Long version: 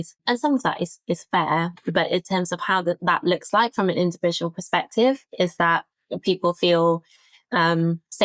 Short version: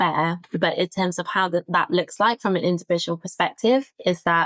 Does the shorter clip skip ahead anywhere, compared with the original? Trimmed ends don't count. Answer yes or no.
no